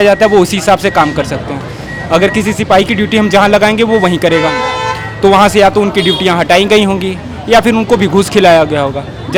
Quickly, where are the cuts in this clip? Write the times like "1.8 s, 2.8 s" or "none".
none